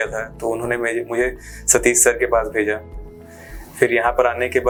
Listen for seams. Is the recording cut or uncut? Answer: uncut